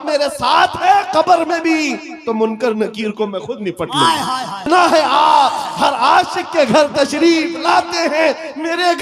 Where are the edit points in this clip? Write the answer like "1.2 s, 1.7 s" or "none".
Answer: 4.7 s